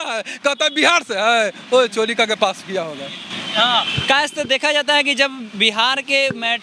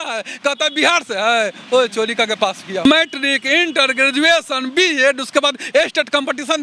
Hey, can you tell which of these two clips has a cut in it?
second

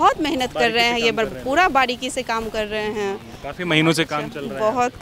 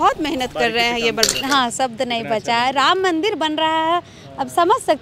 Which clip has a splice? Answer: second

